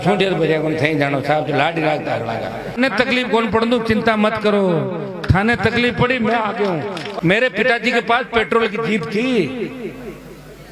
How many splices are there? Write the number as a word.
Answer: two